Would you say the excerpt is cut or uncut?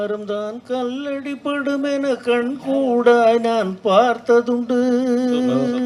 uncut